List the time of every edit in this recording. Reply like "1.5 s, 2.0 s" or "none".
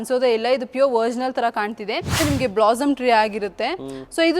2.2 s

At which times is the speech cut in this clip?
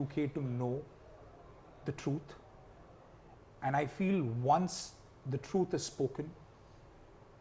none

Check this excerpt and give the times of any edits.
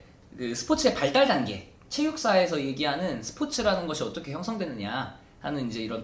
none

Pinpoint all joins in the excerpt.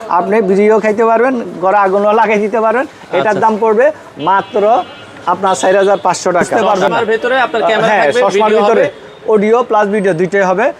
6.6 s

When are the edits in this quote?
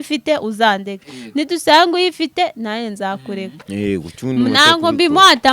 3.6 s

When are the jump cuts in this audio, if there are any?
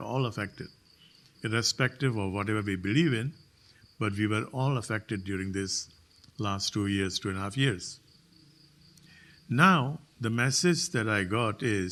none

